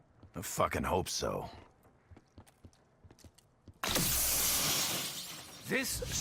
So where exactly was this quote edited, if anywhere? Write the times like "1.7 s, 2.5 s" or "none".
4.6 s